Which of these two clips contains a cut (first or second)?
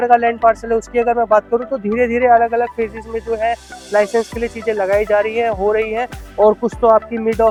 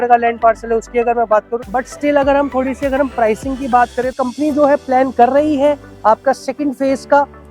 second